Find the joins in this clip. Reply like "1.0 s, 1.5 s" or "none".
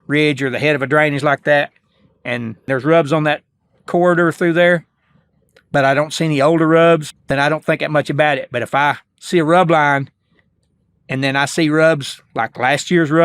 2.7 s, 7.1 s